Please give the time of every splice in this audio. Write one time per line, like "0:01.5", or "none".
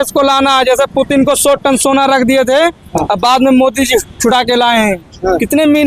none